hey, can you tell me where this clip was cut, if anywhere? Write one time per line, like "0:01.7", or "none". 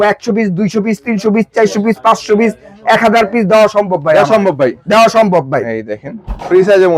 none

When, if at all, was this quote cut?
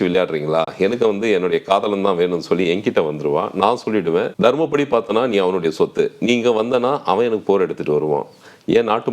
0:04.3

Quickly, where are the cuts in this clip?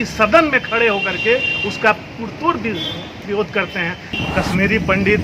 0:04.1

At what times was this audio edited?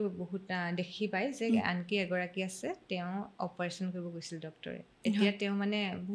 none

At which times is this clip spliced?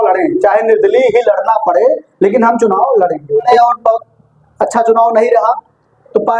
0:03.5

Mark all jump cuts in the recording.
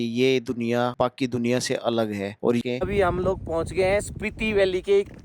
0:02.6

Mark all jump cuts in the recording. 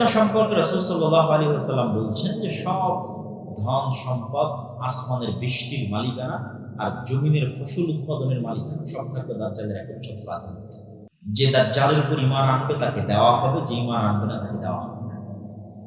0:11.0

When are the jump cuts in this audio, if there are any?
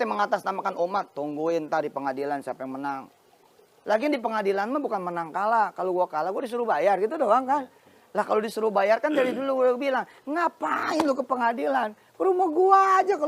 none

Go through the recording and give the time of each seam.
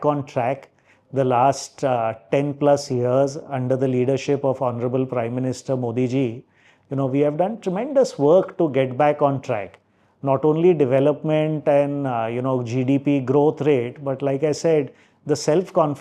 none

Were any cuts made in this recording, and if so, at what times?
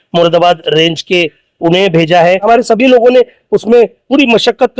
0:02.4

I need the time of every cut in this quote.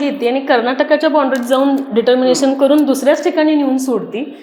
none

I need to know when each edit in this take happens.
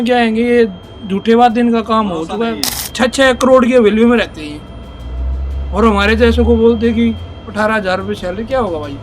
0:02.7

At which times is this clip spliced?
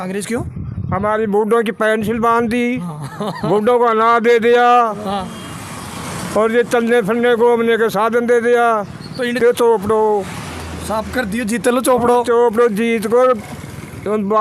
0:09.4

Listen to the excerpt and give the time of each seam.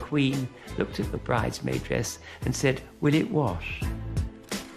none

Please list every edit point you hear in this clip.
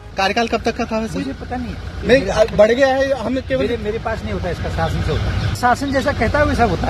0:02.1
0:05.5

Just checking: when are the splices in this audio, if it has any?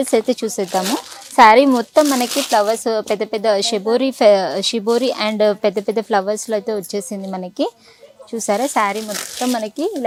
none

